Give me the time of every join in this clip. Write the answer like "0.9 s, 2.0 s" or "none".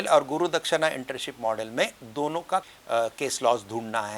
2.6 s